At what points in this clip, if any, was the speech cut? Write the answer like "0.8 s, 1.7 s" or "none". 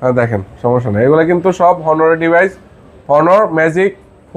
none